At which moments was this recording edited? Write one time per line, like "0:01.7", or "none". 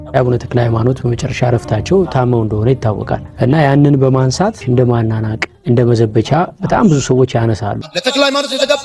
none